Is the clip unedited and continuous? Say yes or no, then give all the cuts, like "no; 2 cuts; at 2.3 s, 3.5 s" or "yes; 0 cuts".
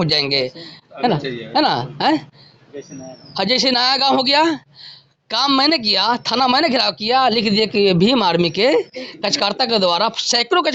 yes; 0 cuts